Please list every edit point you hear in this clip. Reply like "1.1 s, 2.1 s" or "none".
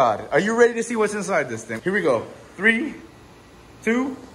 1.6 s